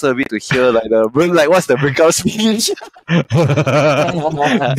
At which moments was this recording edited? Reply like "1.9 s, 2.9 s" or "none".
none